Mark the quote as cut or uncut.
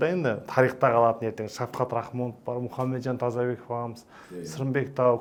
uncut